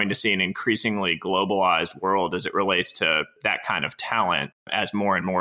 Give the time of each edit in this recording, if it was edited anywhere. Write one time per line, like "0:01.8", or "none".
0:03.3
0:04.6